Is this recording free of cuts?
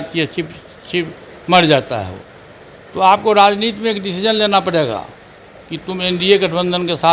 yes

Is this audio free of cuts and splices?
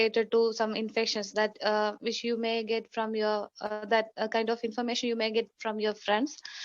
no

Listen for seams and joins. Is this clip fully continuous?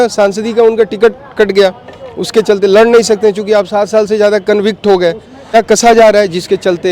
no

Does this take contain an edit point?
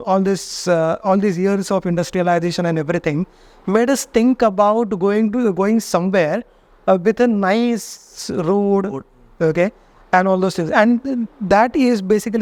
no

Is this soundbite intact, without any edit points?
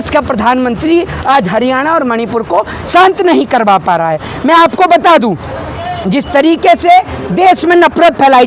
yes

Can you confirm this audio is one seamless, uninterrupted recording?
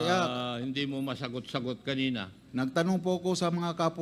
yes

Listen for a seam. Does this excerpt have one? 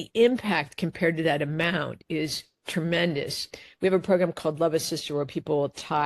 yes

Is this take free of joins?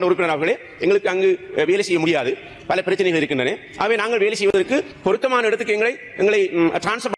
yes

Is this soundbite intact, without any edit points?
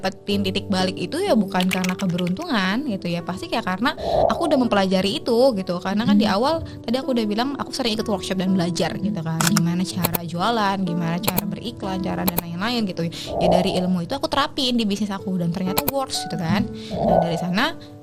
yes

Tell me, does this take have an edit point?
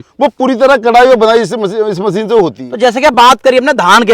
no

